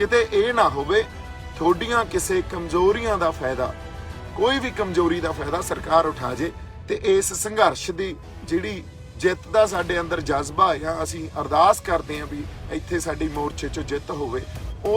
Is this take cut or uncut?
cut